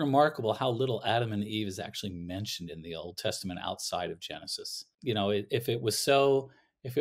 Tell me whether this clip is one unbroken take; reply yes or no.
no